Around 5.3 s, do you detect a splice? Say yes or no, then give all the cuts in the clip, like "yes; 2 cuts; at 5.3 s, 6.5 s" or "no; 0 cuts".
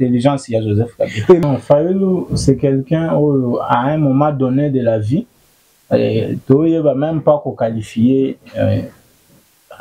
no; 1 cut; at 1.4 s